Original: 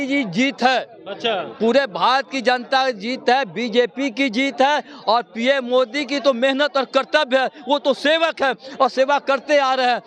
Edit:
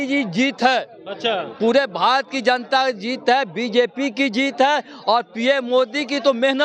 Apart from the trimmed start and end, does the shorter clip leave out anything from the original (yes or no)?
no